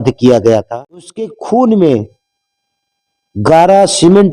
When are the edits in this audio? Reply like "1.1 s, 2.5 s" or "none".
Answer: 1.4 s